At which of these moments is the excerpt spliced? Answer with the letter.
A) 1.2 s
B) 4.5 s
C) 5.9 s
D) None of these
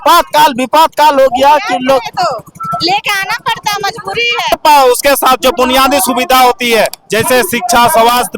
B